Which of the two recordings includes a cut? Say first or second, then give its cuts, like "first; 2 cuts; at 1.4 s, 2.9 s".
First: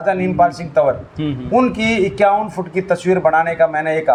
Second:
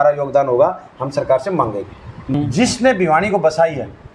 second; 1 cut; at 2.3 s